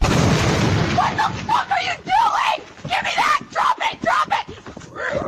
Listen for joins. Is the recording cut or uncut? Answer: uncut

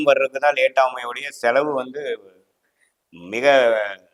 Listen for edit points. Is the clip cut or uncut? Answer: uncut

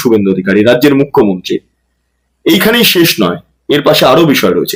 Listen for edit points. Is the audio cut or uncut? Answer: uncut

